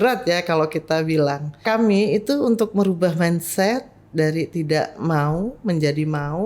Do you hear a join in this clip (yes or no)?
yes